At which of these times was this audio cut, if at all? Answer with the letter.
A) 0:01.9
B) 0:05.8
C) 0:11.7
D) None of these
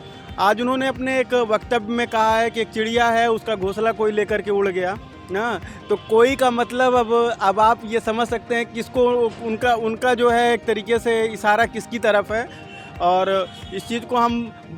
D